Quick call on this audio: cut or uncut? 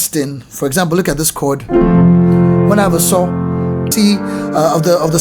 cut